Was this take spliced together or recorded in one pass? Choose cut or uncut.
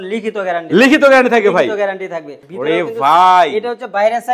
cut